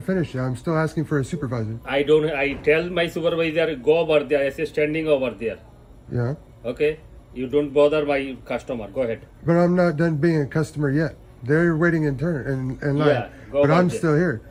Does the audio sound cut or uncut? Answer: uncut